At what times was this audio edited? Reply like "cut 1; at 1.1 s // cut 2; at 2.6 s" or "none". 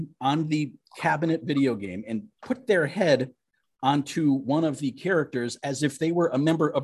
none